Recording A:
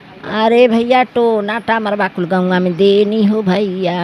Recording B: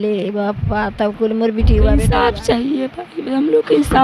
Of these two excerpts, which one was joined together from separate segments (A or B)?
B